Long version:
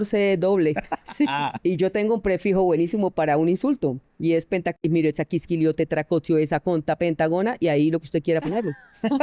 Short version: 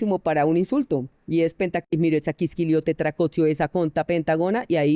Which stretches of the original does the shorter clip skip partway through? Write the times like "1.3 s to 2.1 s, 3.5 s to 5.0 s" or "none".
none